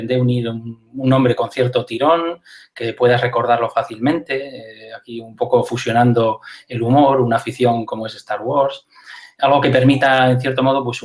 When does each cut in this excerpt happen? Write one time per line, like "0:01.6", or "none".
none